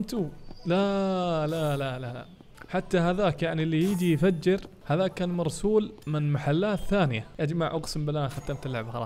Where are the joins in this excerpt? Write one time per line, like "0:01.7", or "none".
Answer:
none

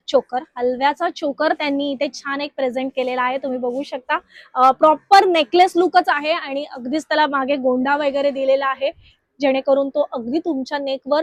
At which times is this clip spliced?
none

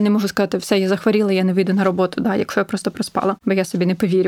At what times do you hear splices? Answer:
0:03.4

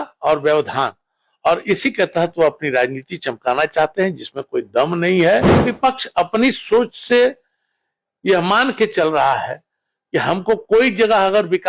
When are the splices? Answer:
0:05.5

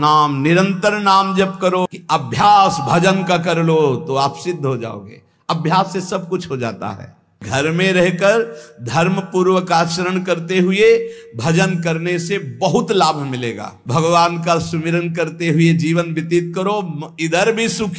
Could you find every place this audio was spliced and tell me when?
0:01.8
0:07.4
0:13.7

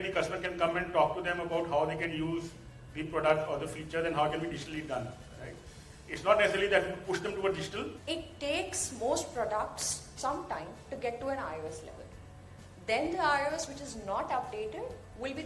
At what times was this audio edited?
0:08.0

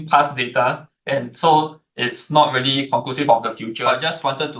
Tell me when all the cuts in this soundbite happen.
0:03.7

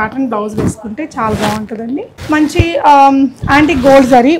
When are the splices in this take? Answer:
0:02.1

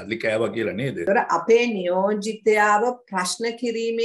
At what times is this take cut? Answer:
0:01.1

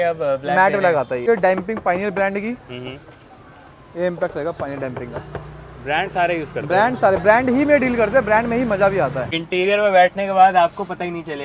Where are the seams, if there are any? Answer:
0:01.2
0:09.3

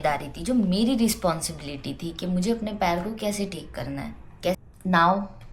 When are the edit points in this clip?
0:04.6

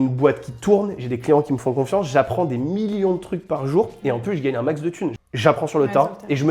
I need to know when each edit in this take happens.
0:05.2

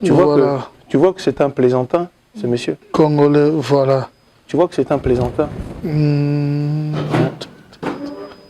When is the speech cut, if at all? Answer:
none

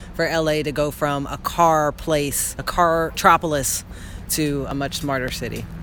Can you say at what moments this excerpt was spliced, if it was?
0:02.8
0:04.7

